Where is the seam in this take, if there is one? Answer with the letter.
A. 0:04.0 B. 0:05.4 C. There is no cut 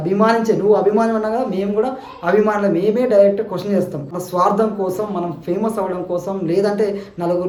C